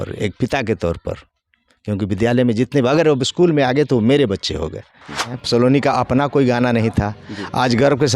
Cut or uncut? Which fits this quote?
cut